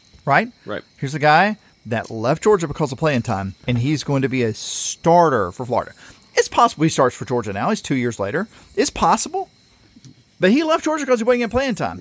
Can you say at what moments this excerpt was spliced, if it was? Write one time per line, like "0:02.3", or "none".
0:03.5